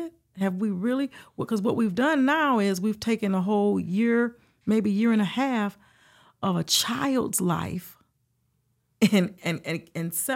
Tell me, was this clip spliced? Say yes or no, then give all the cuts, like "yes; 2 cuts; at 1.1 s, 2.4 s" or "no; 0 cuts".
no; 0 cuts